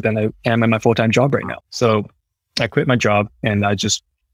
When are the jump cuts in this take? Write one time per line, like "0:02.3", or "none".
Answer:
0:02.1
0:03.4